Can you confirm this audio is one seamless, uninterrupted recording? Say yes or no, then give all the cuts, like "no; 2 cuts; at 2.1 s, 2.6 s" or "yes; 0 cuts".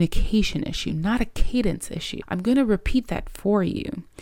no; 1 cut; at 2.1 s